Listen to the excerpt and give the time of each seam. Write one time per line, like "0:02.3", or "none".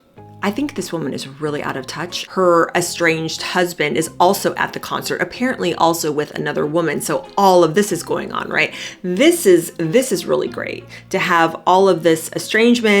0:02.1